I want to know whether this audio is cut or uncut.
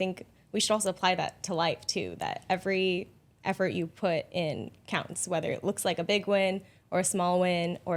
uncut